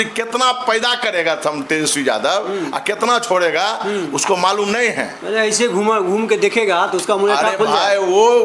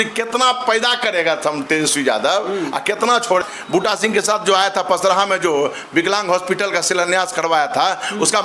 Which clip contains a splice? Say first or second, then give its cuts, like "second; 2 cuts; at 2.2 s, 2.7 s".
second; 1 cut; at 3.4 s